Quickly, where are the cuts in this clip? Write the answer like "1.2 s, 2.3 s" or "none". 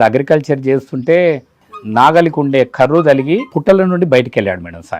1.6 s, 3.5 s